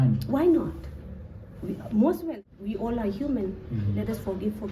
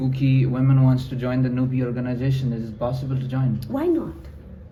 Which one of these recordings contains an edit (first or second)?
first